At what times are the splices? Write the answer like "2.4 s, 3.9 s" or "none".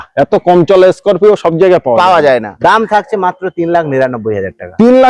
2.5 s